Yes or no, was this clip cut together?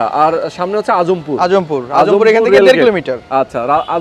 no